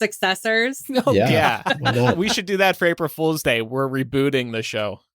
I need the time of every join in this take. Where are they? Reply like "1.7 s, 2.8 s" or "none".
none